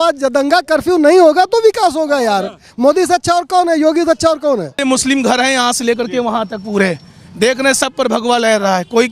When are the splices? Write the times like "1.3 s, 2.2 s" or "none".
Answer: 4.8 s